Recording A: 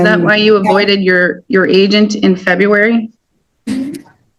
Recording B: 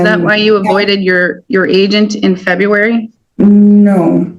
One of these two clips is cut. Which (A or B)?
B